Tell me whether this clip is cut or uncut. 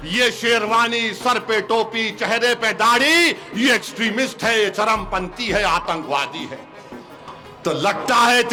uncut